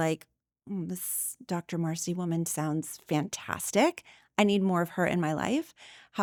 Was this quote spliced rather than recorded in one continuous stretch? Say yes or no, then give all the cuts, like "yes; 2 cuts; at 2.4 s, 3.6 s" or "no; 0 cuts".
no; 0 cuts